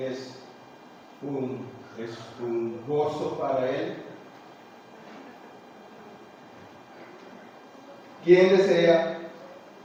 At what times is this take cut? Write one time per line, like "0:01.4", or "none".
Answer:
none